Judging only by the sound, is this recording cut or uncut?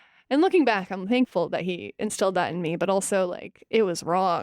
cut